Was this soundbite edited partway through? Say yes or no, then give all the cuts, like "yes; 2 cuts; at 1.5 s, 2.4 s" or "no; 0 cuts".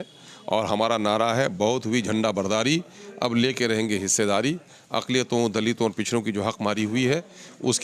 no; 0 cuts